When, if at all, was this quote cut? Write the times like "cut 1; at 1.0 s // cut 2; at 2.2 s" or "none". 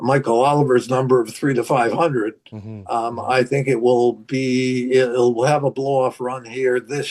none